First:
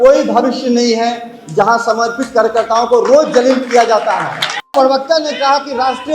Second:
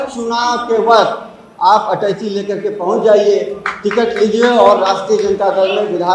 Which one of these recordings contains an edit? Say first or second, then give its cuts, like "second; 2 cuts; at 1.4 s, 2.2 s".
first; 1 cut; at 4.7 s